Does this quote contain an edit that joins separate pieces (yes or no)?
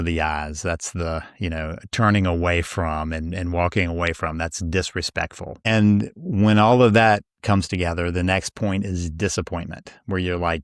no